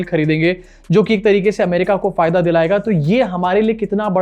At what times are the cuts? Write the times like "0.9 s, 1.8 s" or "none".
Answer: none